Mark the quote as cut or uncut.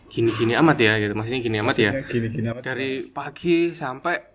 uncut